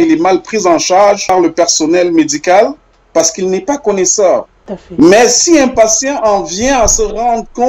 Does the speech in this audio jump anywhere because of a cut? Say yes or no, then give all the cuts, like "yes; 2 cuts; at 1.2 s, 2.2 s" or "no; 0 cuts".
yes; 2 cuts; at 1.2 s, 4.6 s